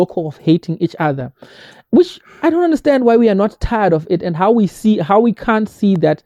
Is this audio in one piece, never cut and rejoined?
yes; 0 cuts

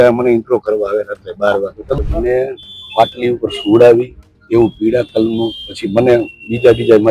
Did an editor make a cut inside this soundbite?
yes; 1 cut; at 2.0 s

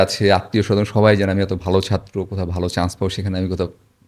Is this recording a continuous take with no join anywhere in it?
yes; 0 cuts

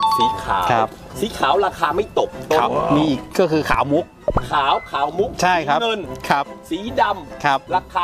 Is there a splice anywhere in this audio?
no; 0 cuts

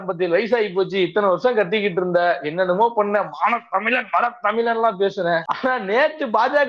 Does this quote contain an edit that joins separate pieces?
yes; 1 cut; at 5.5 s

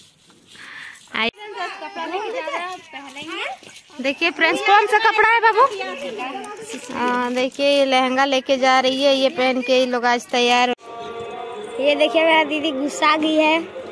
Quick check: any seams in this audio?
yes; 2 cuts; at 1.3 s, 10.7 s

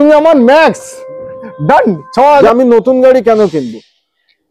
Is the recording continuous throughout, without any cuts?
no; 1 cut; at 2.4 s

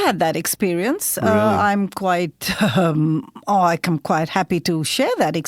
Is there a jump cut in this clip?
no; 0 cuts

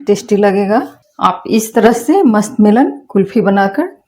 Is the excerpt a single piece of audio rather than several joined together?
no; 1 cut; at 1.0 s

